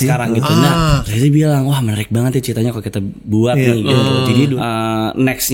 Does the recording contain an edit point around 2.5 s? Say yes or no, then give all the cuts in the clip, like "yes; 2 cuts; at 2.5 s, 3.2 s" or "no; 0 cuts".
no; 2 cuts; at 1.1 s, 4.5 s